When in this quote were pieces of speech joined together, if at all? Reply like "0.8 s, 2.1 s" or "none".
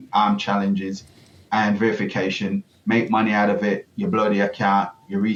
none